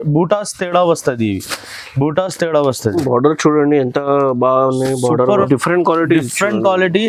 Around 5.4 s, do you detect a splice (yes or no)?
yes